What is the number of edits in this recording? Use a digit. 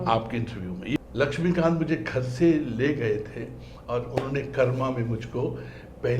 1